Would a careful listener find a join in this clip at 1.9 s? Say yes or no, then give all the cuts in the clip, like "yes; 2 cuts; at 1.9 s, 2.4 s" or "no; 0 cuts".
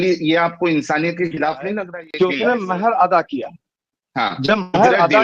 yes; 1 cut; at 1.9 s